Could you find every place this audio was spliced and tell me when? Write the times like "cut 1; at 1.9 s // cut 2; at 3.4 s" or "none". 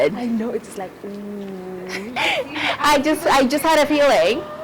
cut 1; at 2.1 s